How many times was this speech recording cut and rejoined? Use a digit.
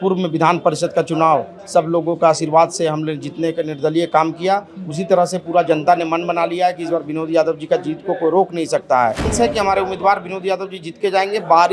1